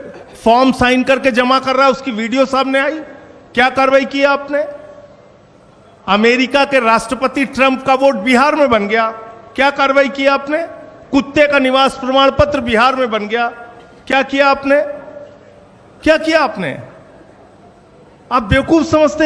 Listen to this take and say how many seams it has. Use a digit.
0